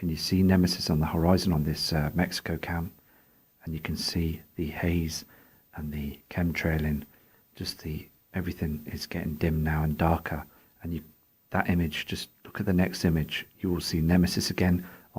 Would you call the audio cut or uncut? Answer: cut